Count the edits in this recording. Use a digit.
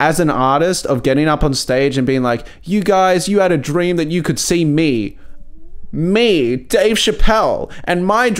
0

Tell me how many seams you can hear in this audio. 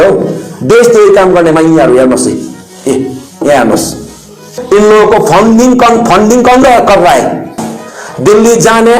1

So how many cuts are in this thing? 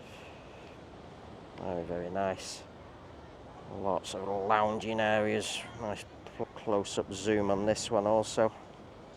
1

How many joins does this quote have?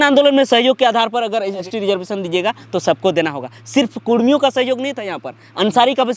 1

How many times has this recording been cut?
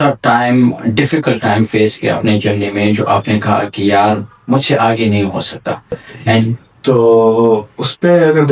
1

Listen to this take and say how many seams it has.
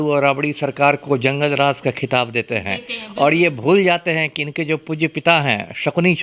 0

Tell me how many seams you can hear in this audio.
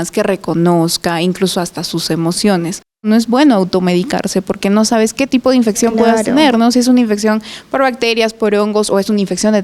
1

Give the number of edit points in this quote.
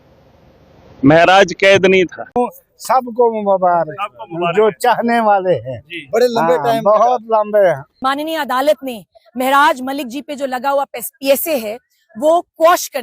2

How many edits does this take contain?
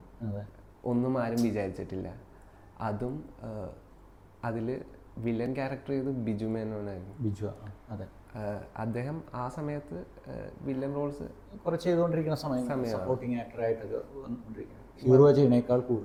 0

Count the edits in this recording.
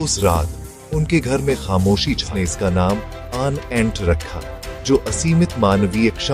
1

